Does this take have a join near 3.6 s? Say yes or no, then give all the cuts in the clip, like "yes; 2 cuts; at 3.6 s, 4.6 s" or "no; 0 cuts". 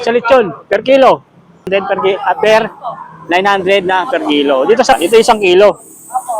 no; 2 cuts; at 1.7 s, 4.9 s